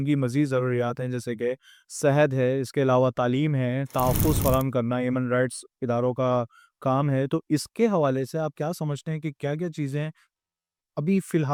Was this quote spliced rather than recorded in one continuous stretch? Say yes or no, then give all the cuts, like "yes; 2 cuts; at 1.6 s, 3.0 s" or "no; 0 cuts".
no; 0 cuts